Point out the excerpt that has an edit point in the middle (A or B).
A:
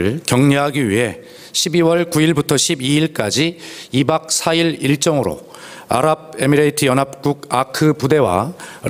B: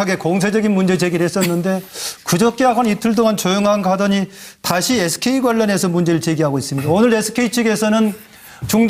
A